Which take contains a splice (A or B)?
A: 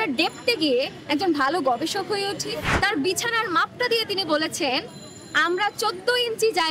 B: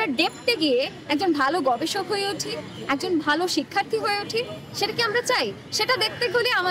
A